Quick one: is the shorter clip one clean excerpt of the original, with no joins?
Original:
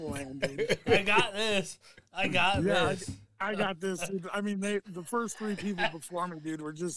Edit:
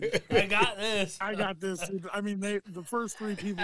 no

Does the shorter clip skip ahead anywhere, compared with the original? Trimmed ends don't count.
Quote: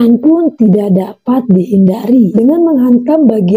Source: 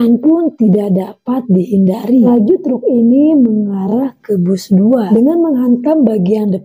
yes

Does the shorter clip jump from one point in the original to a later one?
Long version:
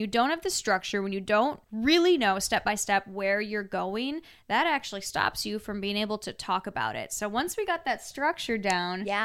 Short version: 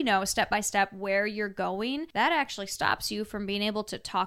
yes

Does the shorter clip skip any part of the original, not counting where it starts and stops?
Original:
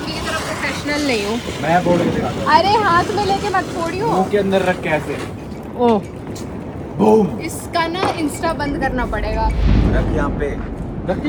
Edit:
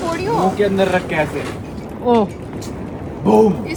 no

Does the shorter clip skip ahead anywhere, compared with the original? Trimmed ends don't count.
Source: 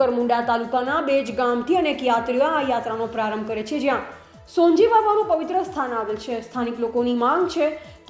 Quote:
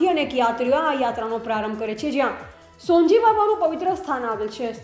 no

